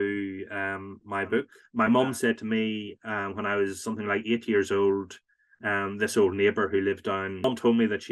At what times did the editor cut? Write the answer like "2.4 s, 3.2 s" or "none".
1.6 s, 7.4 s

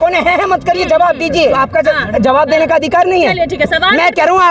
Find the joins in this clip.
1.5 s

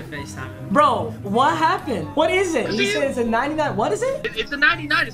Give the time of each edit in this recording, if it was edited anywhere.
2.1 s

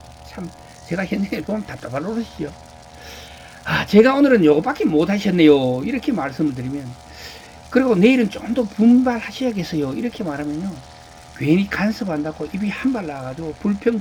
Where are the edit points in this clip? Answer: none

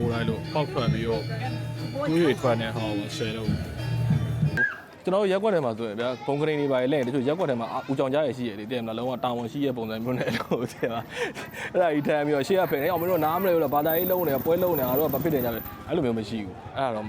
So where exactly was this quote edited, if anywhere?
4.6 s

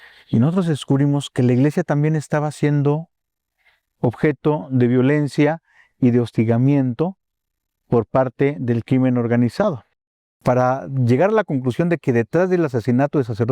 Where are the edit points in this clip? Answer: 10.3 s

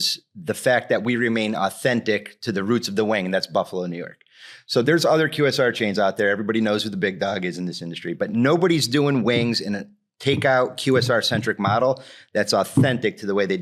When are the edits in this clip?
none

